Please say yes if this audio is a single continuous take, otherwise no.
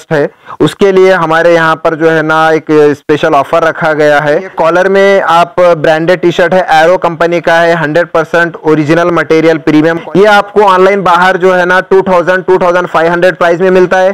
no